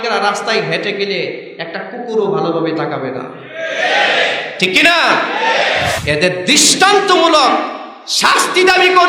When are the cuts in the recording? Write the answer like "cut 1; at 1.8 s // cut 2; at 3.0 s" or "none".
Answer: cut 1; at 6.0 s

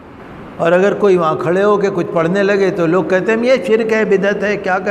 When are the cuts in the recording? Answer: none

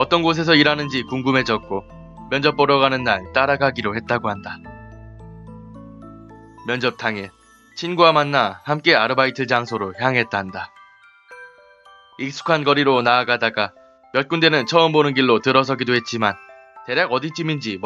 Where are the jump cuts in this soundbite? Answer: cut 1; at 11.2 s

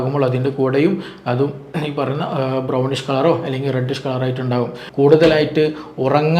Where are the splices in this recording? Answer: cut 1; at 4.8 s

